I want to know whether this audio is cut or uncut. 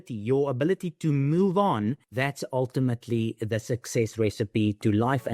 cut